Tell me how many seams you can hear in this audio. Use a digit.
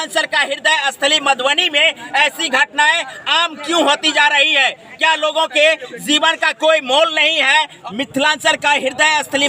1